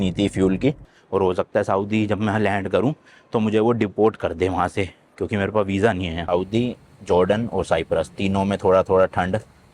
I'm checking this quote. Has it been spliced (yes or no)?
yes